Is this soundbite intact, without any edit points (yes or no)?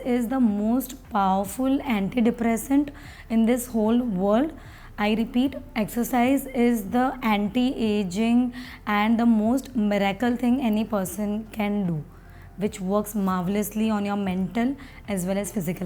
yes